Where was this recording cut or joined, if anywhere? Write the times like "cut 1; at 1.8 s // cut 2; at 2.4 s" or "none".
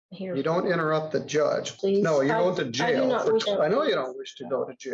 cut 1; at 1.7 s // cut 2; at 3.4 s